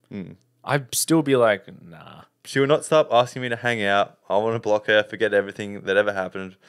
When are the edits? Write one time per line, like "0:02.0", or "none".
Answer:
0:02.4